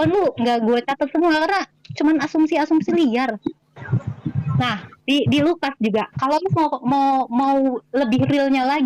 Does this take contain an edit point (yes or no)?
no